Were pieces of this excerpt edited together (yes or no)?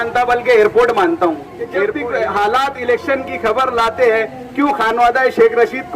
yes